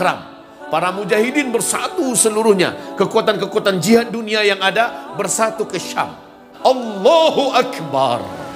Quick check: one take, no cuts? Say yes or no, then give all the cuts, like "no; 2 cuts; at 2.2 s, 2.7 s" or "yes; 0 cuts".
no; 1 cut; at 6.4 s